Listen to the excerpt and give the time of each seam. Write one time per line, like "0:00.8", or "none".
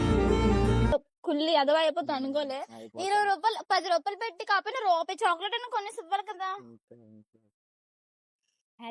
0:00.9